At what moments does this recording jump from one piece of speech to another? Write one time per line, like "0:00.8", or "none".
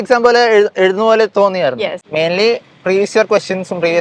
0:02.0